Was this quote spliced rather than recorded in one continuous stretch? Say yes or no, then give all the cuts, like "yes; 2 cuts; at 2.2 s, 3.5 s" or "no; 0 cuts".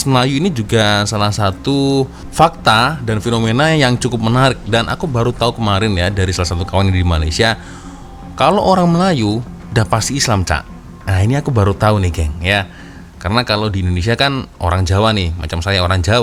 no; 0 cuts